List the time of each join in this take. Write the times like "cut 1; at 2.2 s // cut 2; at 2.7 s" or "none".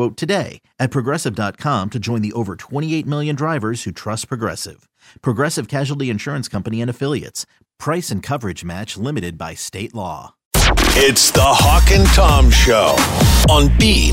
cut 1; at 10.4 s